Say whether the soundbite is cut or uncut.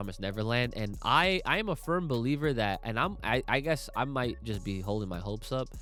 uncut